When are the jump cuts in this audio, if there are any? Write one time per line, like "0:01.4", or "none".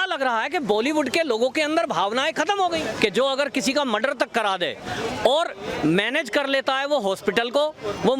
0:02.8